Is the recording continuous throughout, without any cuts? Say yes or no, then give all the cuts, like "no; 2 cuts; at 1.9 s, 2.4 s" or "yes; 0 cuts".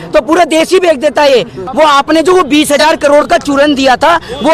no; 1 cut; at 1.6 s